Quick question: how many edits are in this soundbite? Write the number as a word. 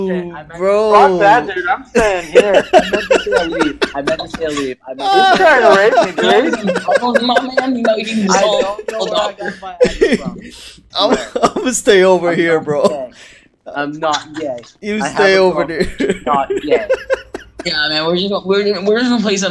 one